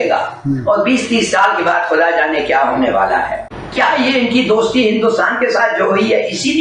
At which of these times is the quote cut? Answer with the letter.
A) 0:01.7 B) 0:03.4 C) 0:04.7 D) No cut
B